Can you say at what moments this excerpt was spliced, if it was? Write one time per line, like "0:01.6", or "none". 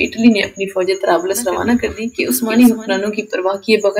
0:02.1